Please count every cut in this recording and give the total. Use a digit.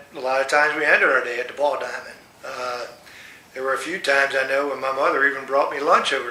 1